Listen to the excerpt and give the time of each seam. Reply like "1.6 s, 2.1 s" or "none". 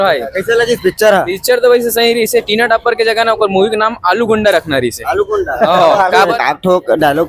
6.4 s